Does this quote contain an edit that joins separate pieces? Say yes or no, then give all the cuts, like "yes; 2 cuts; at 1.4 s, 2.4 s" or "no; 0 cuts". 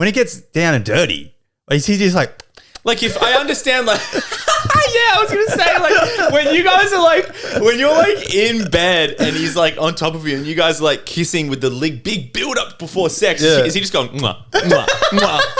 no; 0 cuts